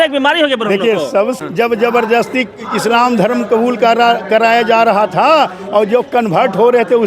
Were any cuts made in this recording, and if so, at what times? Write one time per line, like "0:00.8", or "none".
0:01.4